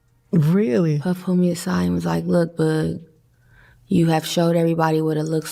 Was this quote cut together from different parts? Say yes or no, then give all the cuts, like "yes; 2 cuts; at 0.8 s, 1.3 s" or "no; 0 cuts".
no; 0 cuts